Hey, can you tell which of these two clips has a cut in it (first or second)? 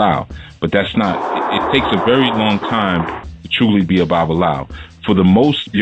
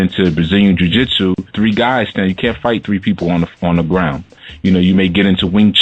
second